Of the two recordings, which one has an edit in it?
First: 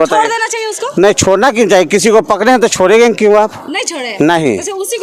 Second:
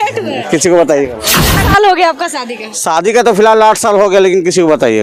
second; 1 cut; at 1.7 s

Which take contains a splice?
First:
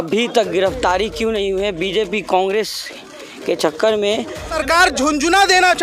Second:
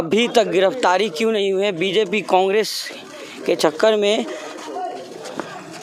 first; 1 cut; at 4.5 s

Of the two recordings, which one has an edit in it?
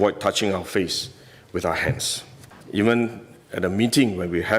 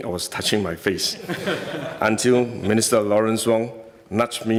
first; 1 cut; at 2.5 s

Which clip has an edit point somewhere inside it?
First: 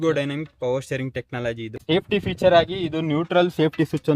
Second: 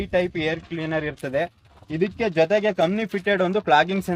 first; 1 cut; at 1.7 s

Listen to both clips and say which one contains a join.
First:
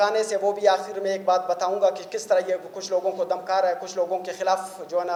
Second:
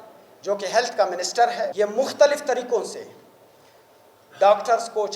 second; 1 cut; at 1.7 s

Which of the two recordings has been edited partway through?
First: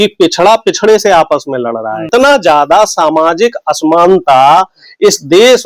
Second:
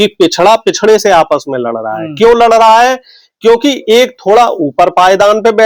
first; 1 cut; at 2.1 s

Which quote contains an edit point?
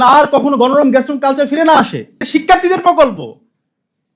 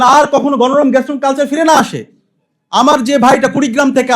first; 1 cut; at 2.2 s

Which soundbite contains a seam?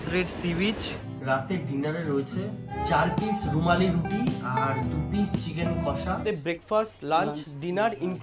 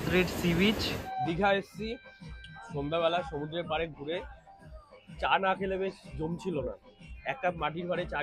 first; 3 cuts; at 1.0 s, 2.7 s, 6.2 s

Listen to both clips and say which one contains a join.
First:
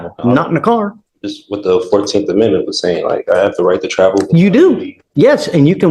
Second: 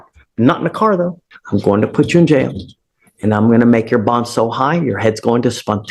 second; 1 cut; at 1.2 s

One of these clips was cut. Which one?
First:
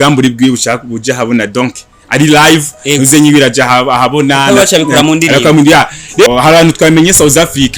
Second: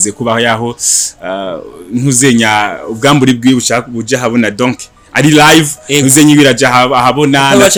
first; 1 cut; at 6.3 s

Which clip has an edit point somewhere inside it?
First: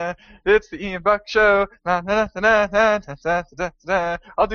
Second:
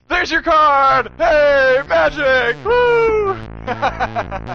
second; 1 cut; at 3.4 s

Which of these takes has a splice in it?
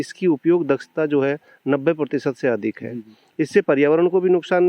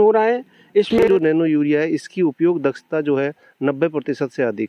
second; 1 cut; at 1.0 s

